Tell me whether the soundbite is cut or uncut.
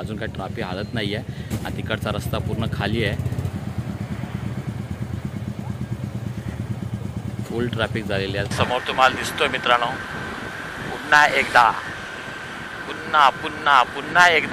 cut